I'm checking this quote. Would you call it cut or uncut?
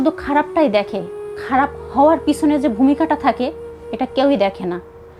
uncut